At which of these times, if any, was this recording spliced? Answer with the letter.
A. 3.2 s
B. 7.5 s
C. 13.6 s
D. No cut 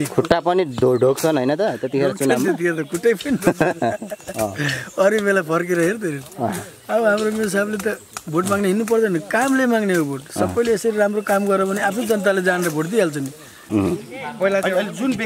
C